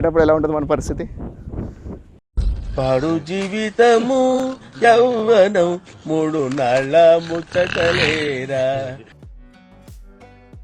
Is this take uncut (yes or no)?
no